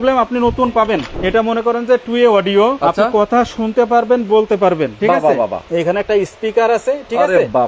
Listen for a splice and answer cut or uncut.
cut